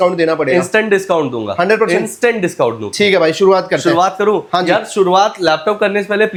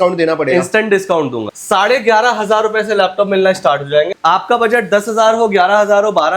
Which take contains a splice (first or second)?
second